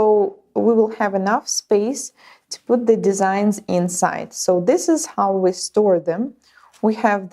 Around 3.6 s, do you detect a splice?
no; 1 cut; at 1.5 s

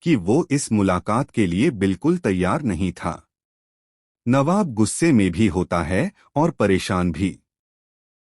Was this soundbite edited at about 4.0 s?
no; 1 cut; at 1.0 s

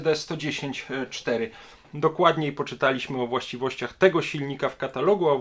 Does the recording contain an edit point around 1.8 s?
yes; 1 cut; at 1.8 s

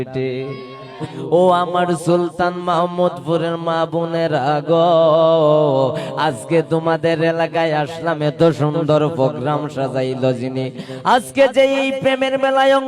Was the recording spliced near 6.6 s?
no; 1 cut; at 1.1 s

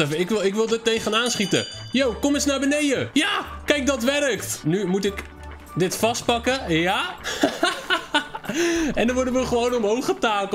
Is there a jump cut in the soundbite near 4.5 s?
yes; 3 cuts; at 3.1 s, 4.5 s, 7.2 s

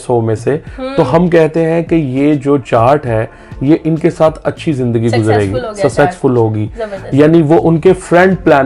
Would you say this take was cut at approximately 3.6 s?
no; 0 cuts

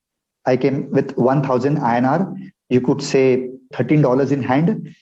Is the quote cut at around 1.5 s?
no; 1 cut; at 3.7 s

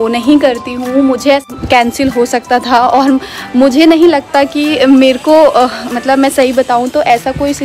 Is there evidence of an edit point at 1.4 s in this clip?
yes; 1 cut; at 1.4 s

